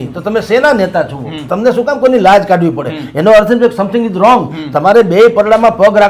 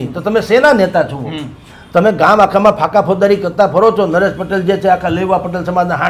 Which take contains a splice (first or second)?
first